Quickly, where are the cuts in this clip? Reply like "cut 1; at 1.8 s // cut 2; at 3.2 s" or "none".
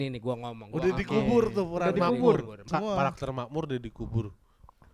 cut 1; at 2.6 s